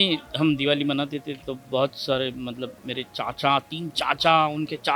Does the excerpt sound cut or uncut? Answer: uncut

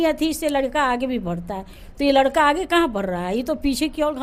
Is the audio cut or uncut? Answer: uncut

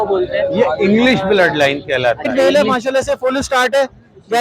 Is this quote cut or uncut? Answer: cut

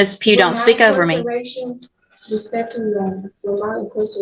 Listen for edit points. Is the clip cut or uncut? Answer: uncut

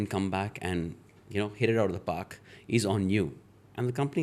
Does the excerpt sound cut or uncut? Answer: uncut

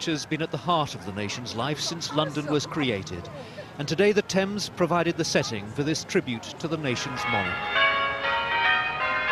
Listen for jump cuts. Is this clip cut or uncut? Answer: uncut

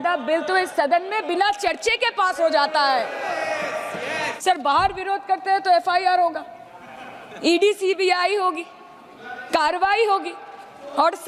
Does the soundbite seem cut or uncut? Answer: cut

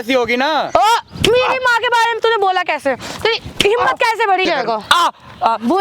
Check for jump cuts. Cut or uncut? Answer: cut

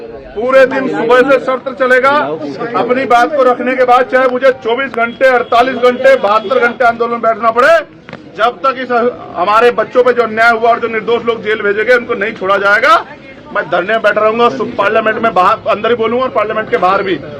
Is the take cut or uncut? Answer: uncut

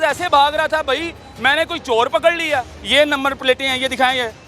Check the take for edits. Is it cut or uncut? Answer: cut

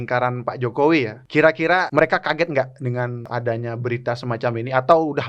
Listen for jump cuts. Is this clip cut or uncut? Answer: cut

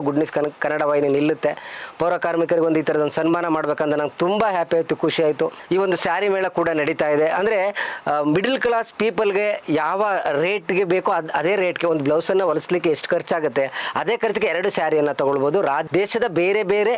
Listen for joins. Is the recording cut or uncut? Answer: uncut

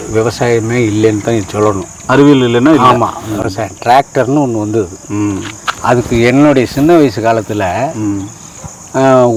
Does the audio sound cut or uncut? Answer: uncut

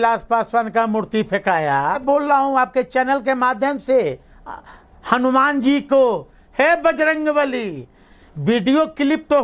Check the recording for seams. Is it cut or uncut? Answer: cut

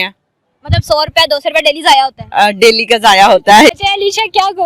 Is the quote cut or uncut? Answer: cut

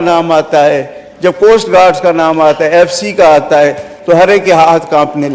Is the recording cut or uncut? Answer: uncut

